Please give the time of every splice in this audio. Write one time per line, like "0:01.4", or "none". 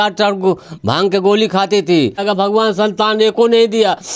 0:02.2